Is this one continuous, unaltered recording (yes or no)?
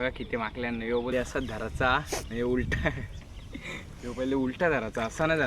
no